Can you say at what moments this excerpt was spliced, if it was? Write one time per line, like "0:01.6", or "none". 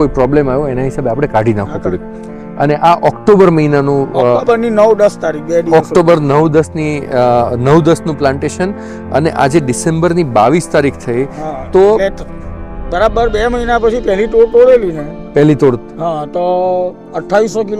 none